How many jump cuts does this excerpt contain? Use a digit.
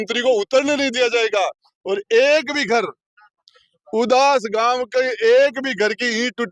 0